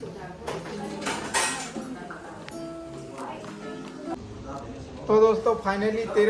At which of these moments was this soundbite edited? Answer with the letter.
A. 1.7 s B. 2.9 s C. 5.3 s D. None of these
D